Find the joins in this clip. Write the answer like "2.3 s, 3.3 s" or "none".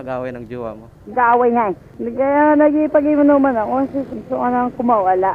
0.9 s, 1.9 s, 4.1 s